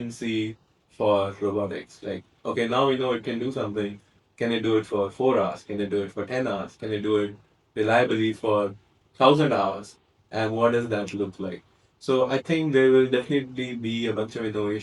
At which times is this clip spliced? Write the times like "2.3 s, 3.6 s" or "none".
none